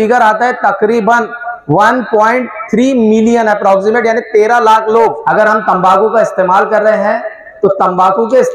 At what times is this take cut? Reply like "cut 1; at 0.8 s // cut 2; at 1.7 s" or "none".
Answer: cut 1; at 5.2 s